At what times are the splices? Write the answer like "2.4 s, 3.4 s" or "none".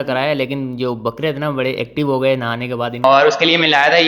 3.0 s